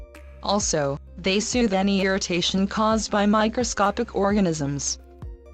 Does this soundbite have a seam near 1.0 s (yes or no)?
no